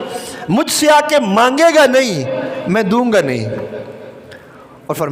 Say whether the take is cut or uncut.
uncut